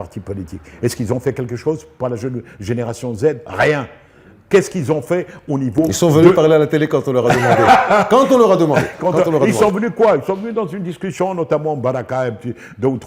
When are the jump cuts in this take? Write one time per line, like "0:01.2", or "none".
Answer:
none